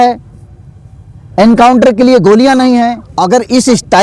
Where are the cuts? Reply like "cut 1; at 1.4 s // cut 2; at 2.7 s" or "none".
cut 1; at 3.1 s